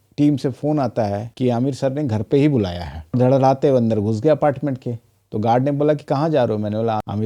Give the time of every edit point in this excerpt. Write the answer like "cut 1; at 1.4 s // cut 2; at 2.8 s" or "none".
cut 1; at 3.2 s